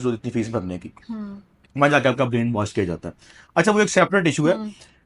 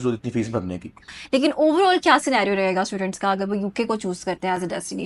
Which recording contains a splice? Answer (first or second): second